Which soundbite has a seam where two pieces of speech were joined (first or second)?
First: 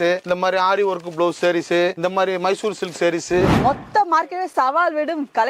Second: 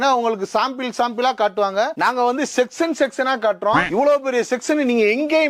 first